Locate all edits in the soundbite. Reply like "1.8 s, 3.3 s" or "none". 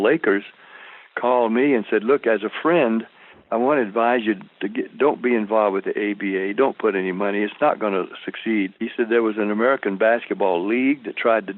8.8 s